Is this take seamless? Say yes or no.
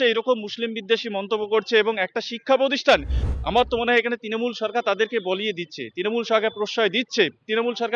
no